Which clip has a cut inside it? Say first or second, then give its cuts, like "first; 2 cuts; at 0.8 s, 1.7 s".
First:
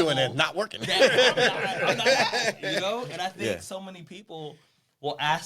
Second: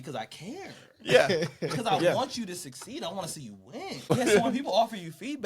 second; 1 cut; at 4.1 s